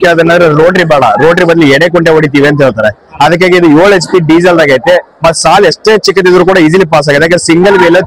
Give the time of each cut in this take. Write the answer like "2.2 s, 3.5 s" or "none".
none